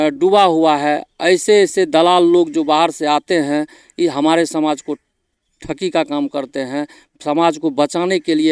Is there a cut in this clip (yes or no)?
no